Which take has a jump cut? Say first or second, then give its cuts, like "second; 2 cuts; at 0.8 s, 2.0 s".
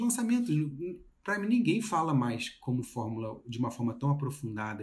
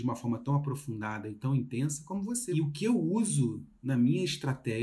second; 1 cut; at 2.4 s